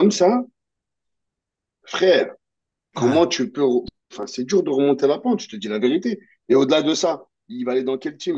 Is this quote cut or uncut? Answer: uncut